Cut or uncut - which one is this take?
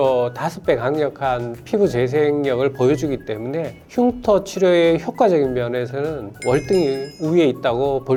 uncut